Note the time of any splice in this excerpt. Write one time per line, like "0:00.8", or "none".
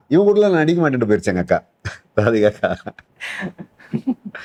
none